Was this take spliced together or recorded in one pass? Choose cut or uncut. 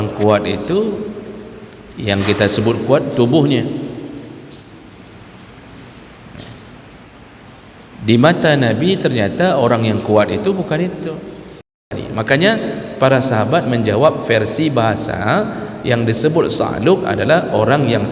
cut